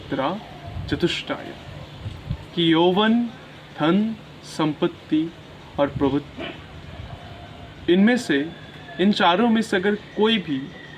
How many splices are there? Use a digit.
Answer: 0